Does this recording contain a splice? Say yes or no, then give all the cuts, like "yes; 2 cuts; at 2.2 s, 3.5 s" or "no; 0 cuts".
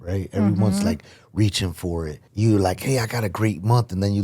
yes; 1 cut; at 2.2 s